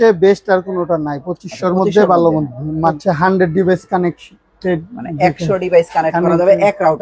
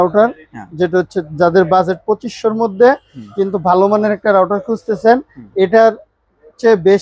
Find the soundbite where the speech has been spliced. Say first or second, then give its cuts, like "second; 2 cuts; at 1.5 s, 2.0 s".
first; 1 cut; at 3.0 s